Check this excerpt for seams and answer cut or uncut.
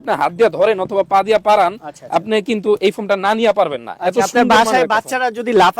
uncut